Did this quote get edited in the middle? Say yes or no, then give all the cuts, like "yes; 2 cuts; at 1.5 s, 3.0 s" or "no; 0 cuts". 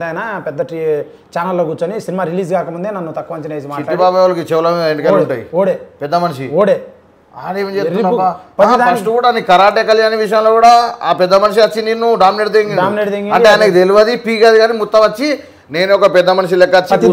no; 0 cuts